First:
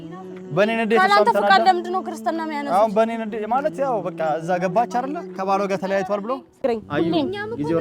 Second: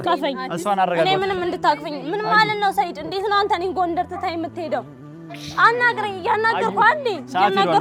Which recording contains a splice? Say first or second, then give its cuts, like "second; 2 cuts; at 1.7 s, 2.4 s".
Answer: first; 1 cut; at 6.6 s